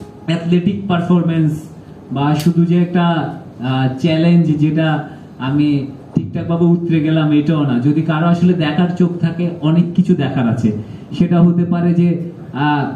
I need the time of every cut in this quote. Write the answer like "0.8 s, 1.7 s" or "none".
none